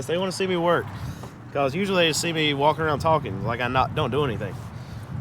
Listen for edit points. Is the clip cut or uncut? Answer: uncut